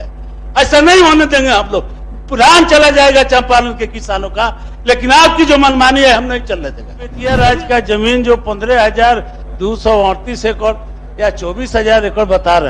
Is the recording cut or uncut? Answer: cut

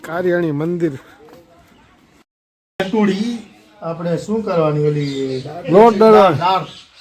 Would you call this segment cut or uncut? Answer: cut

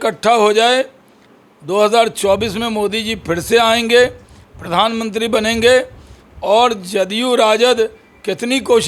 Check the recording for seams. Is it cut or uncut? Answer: uncut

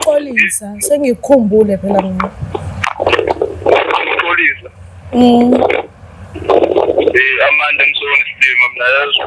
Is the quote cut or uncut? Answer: uncut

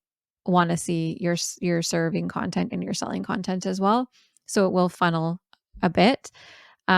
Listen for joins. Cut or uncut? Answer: uncut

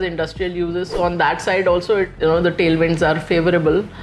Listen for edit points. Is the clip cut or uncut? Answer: uncut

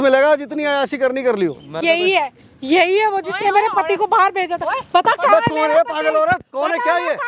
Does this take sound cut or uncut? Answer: cut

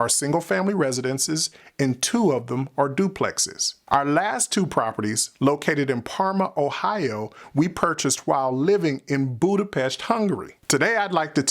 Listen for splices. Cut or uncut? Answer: cut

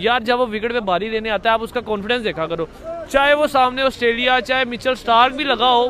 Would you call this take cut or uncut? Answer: uncut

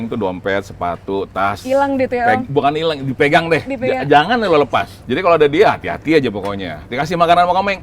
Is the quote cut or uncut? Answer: cut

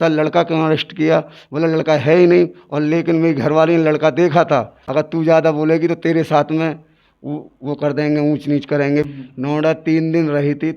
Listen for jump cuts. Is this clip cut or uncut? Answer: cut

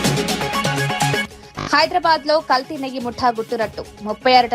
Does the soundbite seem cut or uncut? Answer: uncut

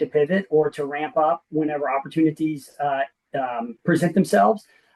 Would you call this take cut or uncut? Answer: uncut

